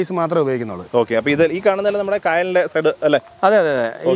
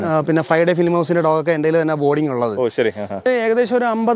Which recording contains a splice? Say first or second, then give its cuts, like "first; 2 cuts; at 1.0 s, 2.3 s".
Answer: second; 1 cut; at 3.3 s